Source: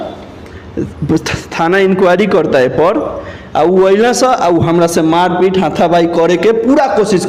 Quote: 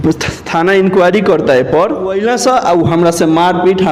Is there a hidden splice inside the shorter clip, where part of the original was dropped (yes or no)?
yes